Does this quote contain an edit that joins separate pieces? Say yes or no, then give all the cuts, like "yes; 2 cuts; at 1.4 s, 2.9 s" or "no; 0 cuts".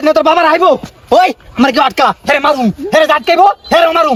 no; 0 cuts